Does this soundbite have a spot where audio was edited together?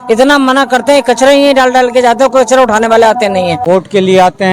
yes; 1 cut; at 3.6 s

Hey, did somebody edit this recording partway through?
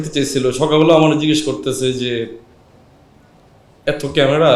no; 0 cuts

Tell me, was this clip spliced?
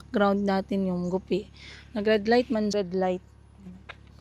yes; 1 cut; at 2.7 s

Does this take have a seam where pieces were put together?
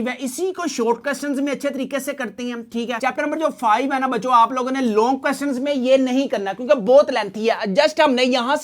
no; 0 cuts

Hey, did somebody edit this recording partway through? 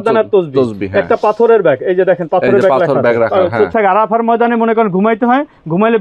yes; 1 cut; at 3.7 s

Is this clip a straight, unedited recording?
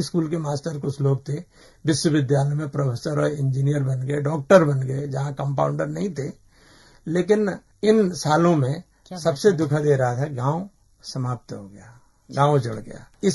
yes; 0 cuts

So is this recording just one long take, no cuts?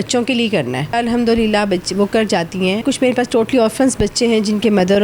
no; 2 cuts; at 0.9 s, 2.8 s

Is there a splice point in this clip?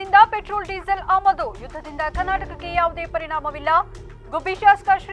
no; 0 cuts

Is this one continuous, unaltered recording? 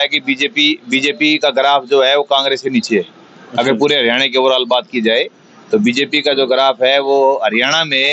yes; 0 cuts

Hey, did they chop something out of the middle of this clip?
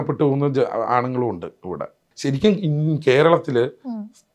yes; 1 cut; at 2.1 s

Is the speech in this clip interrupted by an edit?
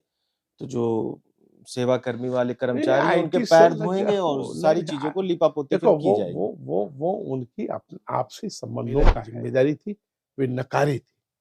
yes; 1 cut; at 9.3 s

